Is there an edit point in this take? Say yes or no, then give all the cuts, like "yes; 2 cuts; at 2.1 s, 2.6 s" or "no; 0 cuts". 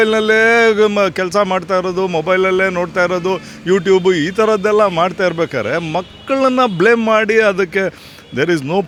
no; 0 cuts